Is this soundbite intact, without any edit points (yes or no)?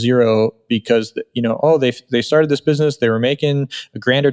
yes